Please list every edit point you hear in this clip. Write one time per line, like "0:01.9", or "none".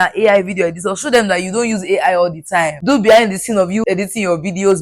0:02.8
0:03.8